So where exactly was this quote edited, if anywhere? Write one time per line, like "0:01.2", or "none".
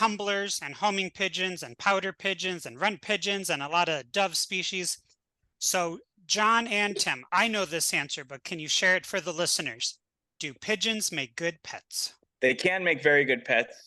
0:12.3